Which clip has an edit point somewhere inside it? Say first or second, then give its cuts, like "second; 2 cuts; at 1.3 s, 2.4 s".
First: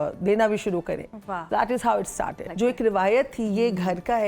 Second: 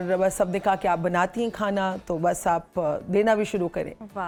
first; 1 cut; at 2.4 s